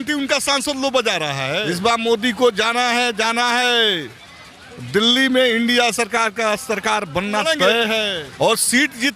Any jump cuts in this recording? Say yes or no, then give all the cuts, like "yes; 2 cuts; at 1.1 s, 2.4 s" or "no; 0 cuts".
yes; 2 cuts; at 1.6 s, 8.2 s